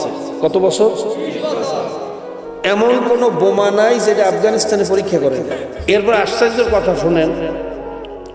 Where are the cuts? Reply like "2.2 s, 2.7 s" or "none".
5.7 s